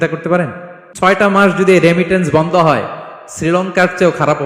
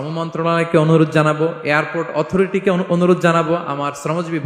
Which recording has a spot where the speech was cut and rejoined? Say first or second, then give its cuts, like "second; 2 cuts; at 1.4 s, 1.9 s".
first; 1 cut; at 0.9 s